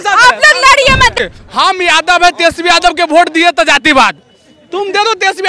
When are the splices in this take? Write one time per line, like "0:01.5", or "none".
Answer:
0:01.0